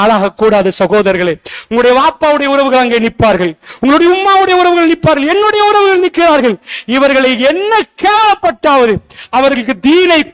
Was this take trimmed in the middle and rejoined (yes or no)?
no